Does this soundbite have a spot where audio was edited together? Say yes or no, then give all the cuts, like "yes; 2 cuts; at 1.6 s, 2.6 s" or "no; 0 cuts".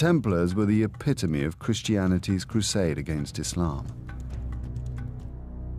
no; 0 cuts